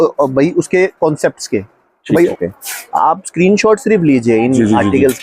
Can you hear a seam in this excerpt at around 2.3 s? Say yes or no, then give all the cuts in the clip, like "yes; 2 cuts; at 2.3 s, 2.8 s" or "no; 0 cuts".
yes; 1 cut; at 2.3 s